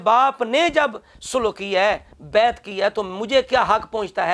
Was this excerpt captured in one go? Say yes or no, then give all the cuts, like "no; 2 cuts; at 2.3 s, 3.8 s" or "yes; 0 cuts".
yes; 0 cuts